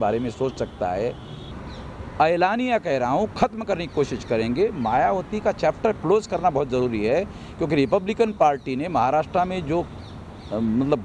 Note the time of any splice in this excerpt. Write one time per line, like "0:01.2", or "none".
0:01.4